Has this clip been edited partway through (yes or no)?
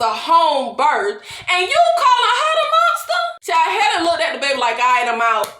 yes